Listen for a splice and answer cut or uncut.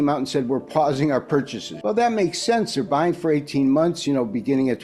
cut